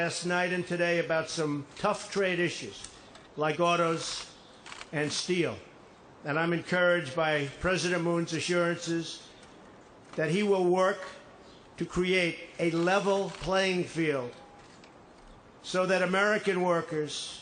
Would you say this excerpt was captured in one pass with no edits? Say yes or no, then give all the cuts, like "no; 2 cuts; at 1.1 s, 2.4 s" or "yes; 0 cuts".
yes; 0 cuts